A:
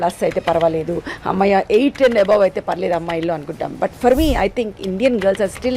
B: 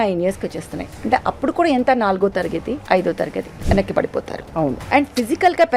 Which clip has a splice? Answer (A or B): B